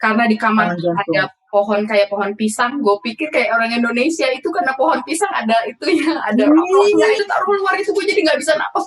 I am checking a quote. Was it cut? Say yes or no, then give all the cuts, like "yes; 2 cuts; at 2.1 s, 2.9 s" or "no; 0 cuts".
yes; 1 cut; at 7.2 s